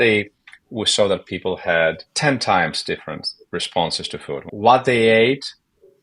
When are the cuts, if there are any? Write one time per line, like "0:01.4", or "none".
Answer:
0:02.1
0:04.5